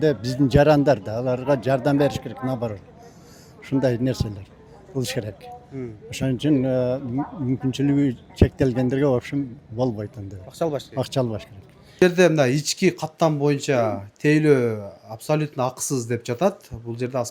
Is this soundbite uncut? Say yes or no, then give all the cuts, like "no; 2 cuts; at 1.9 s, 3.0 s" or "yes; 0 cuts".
yes; 0 cuts